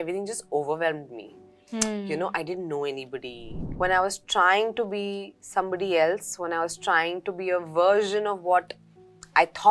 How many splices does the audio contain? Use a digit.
1